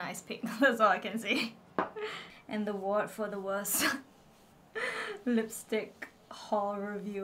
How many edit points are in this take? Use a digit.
1